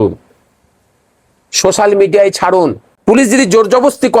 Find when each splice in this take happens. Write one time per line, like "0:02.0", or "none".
0:02.9